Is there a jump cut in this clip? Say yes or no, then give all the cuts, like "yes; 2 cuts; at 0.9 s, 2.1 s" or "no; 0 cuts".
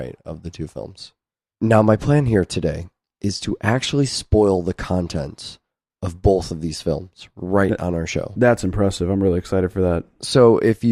no; 0 cuts